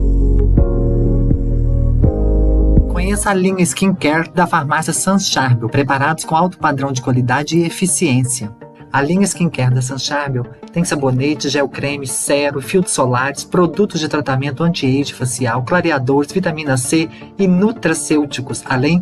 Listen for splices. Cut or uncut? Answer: uncut